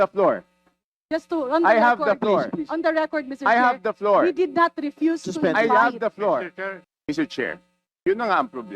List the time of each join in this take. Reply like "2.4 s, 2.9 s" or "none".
6.9 s